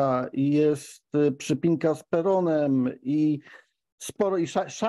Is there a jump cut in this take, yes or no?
no